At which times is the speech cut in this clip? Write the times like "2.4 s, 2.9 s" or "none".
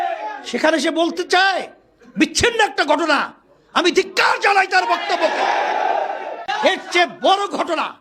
6.4 s